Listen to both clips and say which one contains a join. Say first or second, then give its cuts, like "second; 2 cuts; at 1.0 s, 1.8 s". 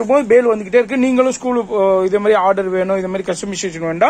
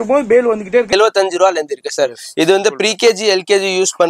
second; 1 cut; at 0.9 s